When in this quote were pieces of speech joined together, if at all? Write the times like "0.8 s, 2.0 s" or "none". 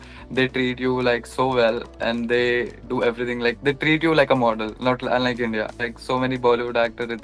5.8 s

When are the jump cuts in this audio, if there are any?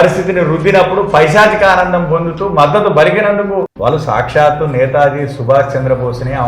3.7 s

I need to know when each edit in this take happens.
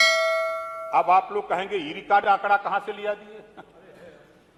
none

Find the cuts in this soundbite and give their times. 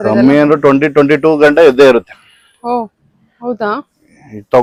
none

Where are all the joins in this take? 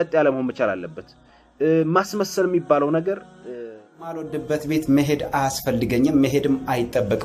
4.2 s

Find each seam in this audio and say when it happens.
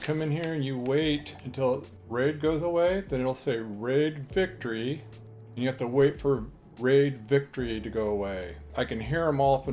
1.8 s, 8.7 s

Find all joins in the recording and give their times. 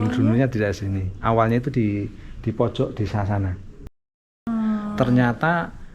4.0 s

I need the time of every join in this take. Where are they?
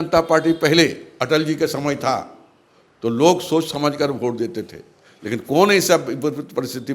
none

